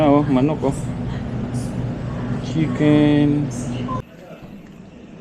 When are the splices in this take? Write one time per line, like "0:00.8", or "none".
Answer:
0:04.0

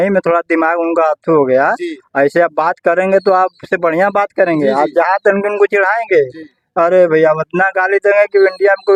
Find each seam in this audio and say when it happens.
none

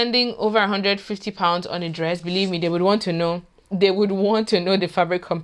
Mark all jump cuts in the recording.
none

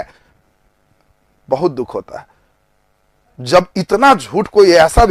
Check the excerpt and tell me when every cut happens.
none

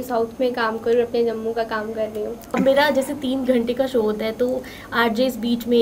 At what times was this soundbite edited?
0:02.4

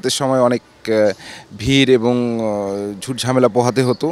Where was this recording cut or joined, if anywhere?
none

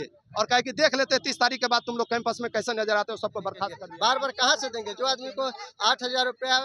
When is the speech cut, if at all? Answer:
0:03.8

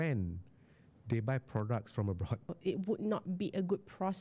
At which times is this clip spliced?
0:02.6

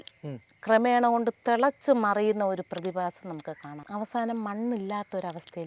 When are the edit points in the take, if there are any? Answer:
0:03.7

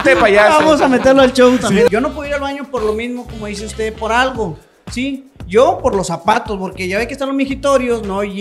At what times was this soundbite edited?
0:01.9

